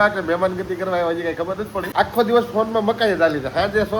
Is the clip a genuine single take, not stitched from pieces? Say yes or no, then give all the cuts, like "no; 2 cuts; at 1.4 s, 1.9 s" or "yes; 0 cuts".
no; 1 cut; at 1.9 s